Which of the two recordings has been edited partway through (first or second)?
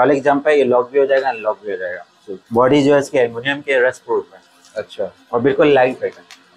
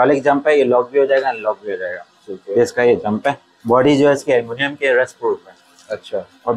first